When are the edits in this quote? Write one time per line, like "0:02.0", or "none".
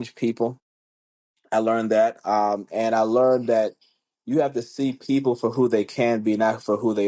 none